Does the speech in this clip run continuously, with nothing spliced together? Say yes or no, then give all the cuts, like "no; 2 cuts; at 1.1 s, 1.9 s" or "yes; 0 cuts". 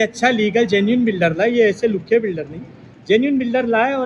yes; 0 cuts